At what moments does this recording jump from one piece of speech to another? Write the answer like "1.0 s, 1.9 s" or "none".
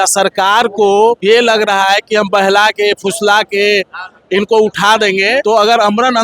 1.2 s, 5.4 s